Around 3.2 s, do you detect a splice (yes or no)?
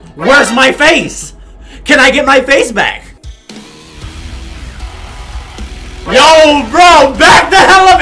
yes